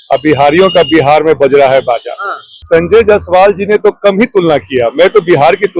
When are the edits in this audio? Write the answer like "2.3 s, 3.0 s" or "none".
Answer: 2.6 s